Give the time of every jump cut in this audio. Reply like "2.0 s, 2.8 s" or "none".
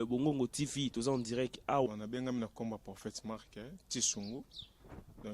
1.9 s

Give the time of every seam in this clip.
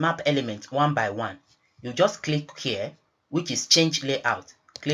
none

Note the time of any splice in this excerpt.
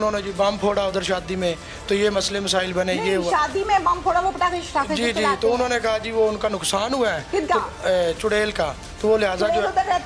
none

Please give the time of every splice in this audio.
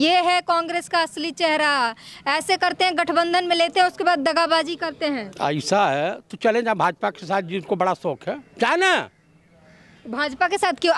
none

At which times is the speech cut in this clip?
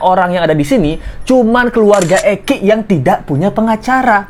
none

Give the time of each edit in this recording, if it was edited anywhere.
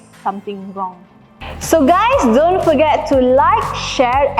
1.6 s

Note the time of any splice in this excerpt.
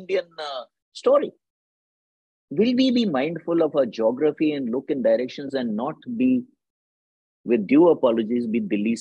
none

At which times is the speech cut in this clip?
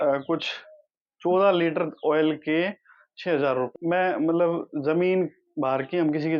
3.7 s

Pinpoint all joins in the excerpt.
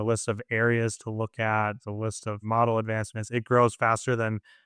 2.4 s

